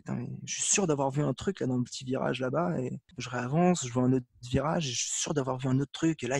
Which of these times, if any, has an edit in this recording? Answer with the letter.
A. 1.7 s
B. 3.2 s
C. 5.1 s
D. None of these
B